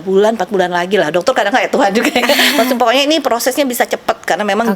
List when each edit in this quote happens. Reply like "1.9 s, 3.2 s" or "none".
none